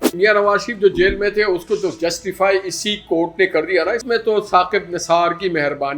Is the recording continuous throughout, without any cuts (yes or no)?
no